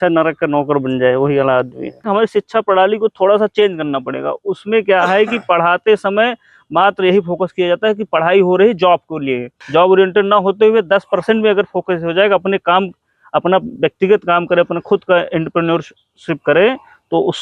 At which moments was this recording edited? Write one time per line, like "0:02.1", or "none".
0:02.1
0:09.5